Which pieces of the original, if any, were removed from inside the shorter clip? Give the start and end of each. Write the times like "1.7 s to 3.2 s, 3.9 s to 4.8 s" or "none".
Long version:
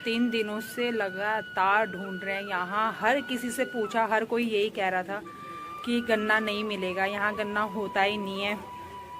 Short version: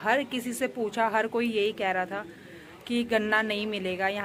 none